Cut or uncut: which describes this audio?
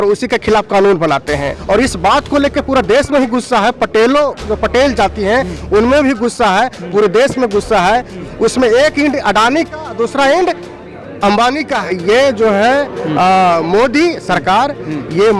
cut